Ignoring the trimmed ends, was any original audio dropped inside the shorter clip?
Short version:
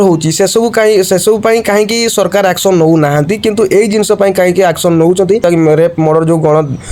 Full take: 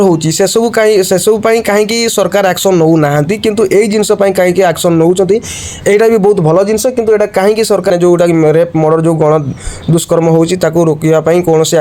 yes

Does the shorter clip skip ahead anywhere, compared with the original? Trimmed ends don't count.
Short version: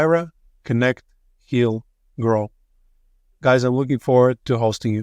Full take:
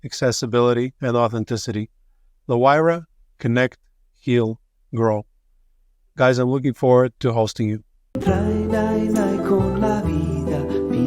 no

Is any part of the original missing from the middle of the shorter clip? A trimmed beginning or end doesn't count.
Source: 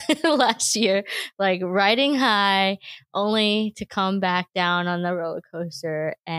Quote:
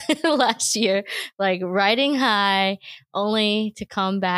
no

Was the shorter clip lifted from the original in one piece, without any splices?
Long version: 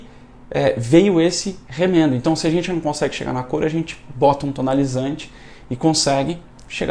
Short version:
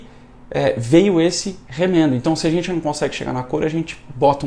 yes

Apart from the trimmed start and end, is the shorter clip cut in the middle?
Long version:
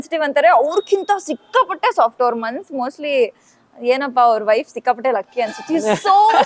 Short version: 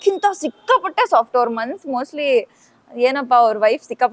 no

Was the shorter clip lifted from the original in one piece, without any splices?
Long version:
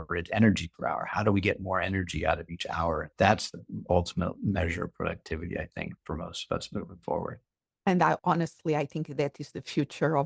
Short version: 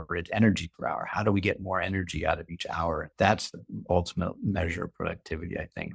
yes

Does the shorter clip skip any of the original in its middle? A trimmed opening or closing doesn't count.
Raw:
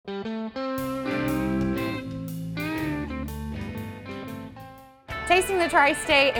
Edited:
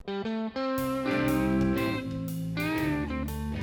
no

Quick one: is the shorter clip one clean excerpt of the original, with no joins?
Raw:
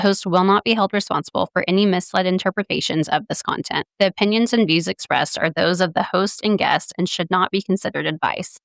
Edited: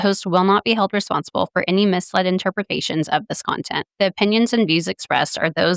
yes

